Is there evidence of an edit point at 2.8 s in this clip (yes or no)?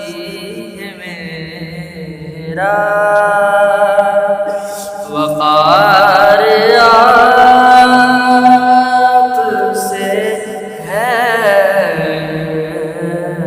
no